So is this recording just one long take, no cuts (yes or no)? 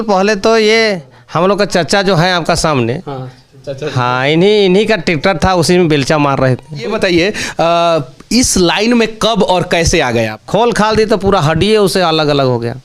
no